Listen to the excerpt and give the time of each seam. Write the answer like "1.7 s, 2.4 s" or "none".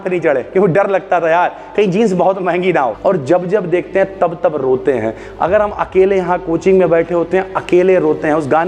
3.0 s